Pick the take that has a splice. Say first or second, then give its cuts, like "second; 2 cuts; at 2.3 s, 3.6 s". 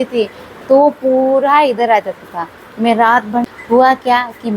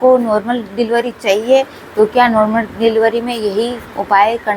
first; 1 cut; at 3.4 s